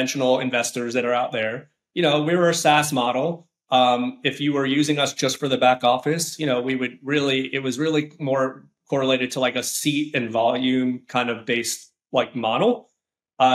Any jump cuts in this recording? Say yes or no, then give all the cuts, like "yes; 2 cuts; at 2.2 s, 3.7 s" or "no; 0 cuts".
no; 0 cuts